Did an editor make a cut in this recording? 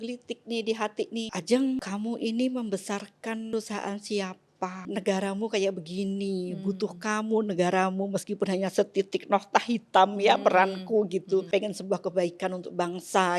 yes; 5 cuts; at 1.3 s, 1.8 s, 3.5 s, 4.8 s, 11.5 s

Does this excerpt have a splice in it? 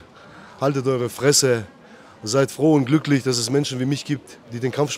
no; 0 cuts

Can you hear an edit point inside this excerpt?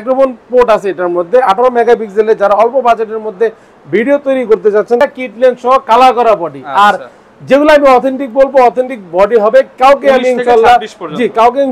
yes; 1 cut; at 5.0 s

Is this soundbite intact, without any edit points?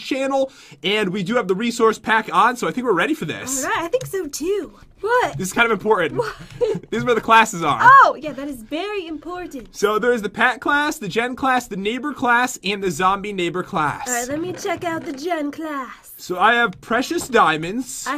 yes; 0 cuts

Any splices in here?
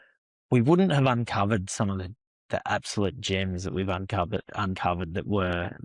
no; 0 cuts

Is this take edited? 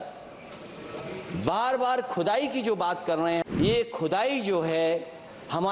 yes; 1 cut; at 3.5 s

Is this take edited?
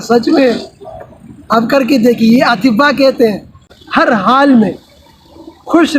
yes; 1 cut; at 3.8 s

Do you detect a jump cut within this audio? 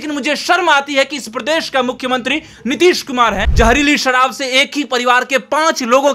yes; 1 cut; at 3.5 s

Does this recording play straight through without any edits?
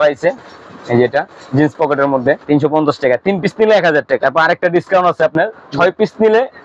no; 2 cuts; at 2.4 s, 4.2 s

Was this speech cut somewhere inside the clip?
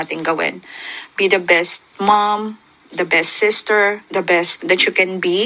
yes; 1 cut; at 4.5 s

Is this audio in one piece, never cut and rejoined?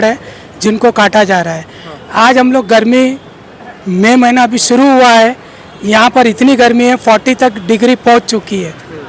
yes; 0 cuts

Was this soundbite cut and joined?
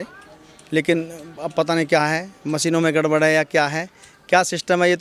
no; 0 cuts

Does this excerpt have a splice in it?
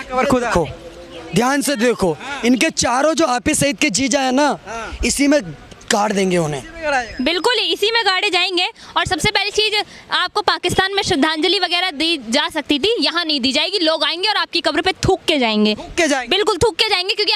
no; 0 cuts

